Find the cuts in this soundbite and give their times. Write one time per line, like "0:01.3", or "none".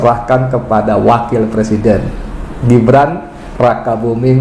none